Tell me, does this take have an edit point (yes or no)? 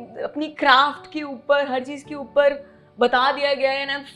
no